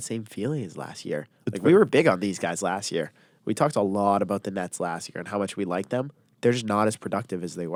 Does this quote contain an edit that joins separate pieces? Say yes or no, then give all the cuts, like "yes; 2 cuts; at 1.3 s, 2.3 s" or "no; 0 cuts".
no; 0 cuts